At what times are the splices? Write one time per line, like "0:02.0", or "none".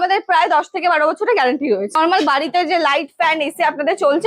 0:01.9